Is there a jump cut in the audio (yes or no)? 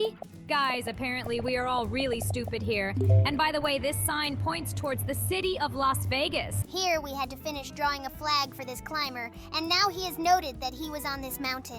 yes